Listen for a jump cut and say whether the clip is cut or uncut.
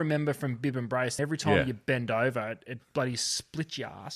cut